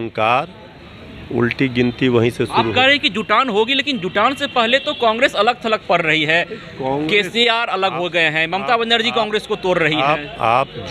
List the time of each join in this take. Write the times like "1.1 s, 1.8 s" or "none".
none